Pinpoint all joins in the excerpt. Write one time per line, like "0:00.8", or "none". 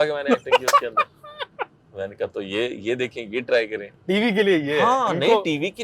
0:03.9